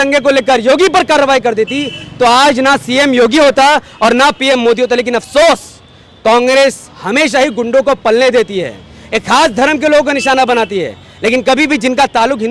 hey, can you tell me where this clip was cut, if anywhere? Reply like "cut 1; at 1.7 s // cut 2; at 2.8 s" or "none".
none